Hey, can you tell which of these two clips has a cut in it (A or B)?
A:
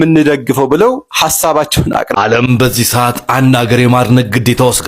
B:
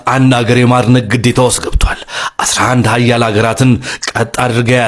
A